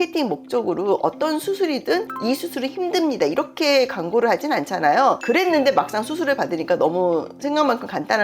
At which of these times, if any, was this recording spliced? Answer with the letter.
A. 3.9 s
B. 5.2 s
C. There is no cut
B